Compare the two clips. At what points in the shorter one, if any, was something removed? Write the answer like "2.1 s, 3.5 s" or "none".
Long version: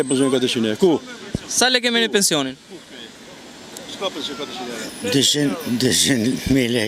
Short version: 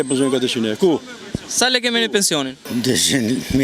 2.6 s

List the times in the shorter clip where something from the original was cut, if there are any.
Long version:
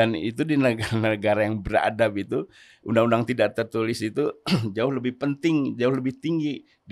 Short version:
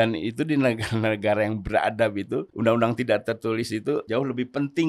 2.5 s, 4.1 s

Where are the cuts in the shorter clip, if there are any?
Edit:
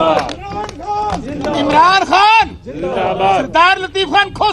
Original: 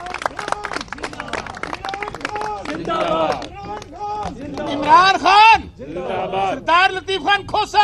none

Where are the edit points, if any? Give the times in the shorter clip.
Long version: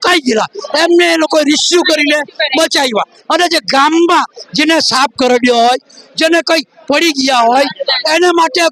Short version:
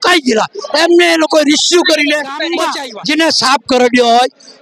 2.7 s

